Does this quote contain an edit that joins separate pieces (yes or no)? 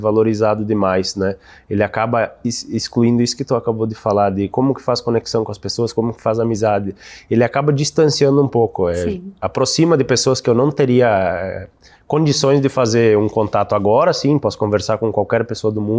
no